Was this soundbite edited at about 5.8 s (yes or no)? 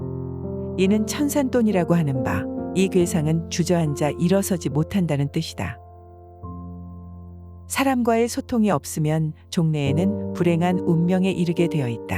no